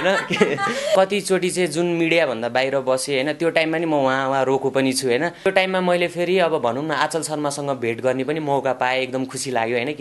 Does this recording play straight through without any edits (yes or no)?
no